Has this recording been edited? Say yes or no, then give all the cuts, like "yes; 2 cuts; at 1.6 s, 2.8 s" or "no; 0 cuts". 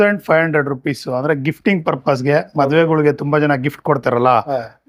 no; 0 cuts